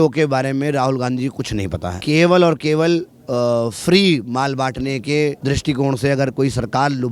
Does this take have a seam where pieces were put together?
yes; 2 cuts; at 1.9 s, 5.4 s

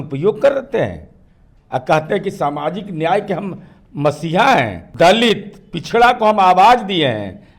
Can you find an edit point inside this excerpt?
yes; 1 cut; at 4.8 s

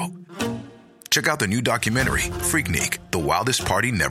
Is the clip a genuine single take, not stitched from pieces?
yes; 0 cuts

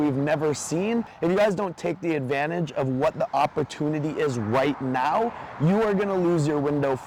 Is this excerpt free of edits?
yes; 0 cuts

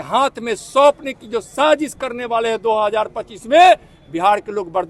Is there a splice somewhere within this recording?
no; 0 cuts

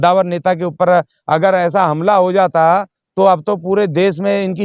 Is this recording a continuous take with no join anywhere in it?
yes; 0 cuts

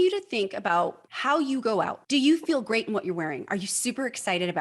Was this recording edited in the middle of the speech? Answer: yes; 2 cuts; at 1.1 s, 2.0 s

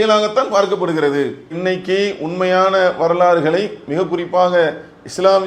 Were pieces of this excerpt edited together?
no; 0 cuts

